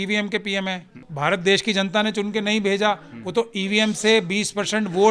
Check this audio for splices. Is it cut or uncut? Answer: cut